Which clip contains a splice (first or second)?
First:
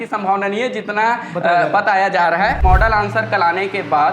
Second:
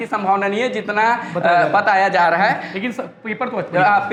first